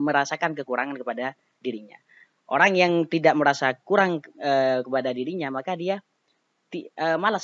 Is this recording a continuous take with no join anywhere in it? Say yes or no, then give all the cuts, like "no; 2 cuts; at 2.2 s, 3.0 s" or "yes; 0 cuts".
yes; 0 cuts